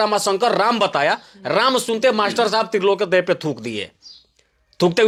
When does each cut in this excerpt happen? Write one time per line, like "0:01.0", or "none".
none